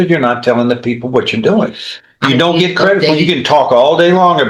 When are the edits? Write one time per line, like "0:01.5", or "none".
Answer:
none